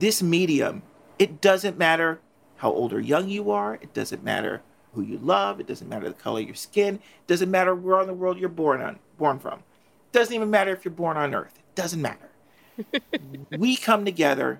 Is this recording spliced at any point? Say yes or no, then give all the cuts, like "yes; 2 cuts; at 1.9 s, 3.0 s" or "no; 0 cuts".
yes; 1 cut; at 0.9 s